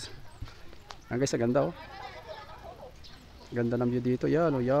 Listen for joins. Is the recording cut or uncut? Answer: uncut